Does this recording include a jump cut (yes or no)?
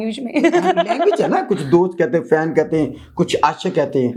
no